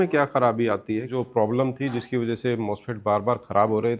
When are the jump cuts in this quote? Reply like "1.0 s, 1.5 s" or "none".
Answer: 1.2 s